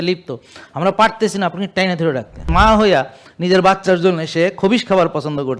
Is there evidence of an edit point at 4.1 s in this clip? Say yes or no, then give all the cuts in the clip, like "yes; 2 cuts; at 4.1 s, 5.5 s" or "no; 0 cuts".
no; 1 cut; at 2.5 s